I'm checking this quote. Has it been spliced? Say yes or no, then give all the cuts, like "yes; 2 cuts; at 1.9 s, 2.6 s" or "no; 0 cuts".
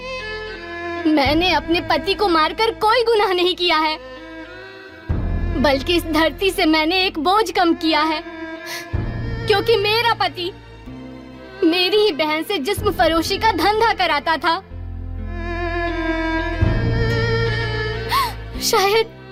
no; 0 cuts